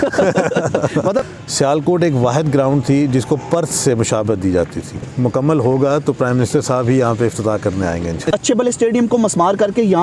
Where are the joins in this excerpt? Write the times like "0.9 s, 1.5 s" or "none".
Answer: 1.4 s, 5.1 s, 8.2 s